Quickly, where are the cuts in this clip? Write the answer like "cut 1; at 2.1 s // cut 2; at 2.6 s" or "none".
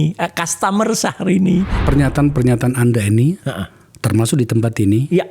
cut 1; at 1.8 s